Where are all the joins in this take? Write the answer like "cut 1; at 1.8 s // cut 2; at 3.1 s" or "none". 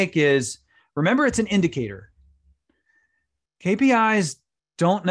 none